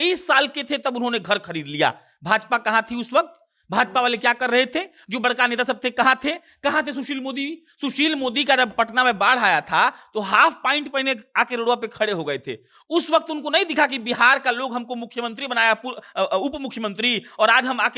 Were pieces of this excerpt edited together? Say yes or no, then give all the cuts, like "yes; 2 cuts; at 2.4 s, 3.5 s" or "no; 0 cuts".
no; 0 cuts